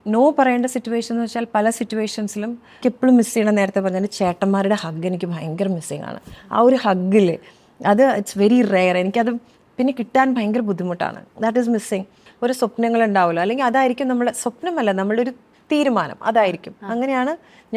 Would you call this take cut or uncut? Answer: cut